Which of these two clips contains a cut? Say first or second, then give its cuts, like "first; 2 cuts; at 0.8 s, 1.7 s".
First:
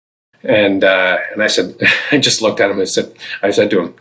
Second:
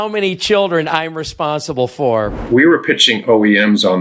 second; 1 cut; at 2.4 s